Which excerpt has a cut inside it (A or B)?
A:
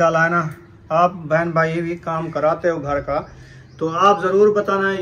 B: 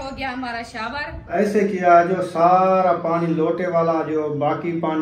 B